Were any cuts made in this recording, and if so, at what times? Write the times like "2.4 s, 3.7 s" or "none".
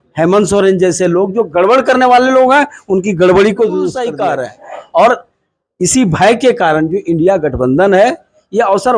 4.1 s